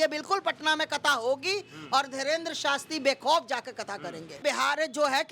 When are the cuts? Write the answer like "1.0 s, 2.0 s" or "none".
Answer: 4.4 s

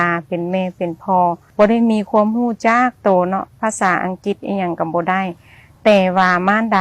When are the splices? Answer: 1.4 s

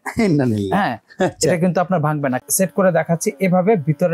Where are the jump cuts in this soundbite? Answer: 2.4 s

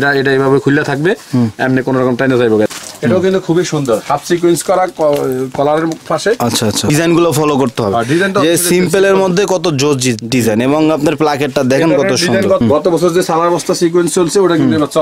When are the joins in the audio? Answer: 2.7 s, 6.9 s, 12.6 s

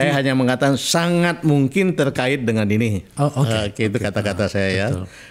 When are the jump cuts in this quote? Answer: none

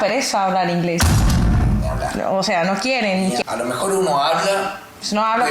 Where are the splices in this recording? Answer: 3.4 s

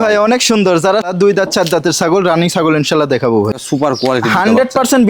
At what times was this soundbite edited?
1.1 s, 3.6 s

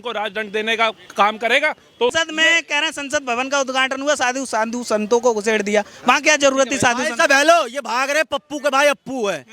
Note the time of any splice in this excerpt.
2.1 s

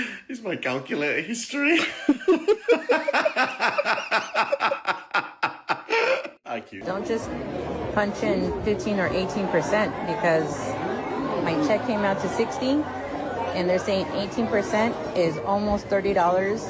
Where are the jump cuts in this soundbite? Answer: 6.8 s

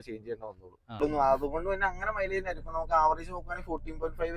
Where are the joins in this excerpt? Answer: 1.0 s

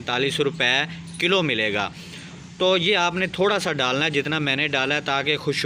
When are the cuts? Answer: none

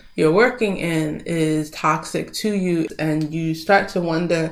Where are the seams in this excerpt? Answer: 2.9 s

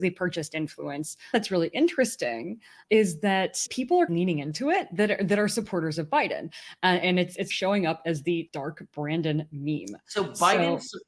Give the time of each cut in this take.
1.3 s, 3.7 s, 8.5 s

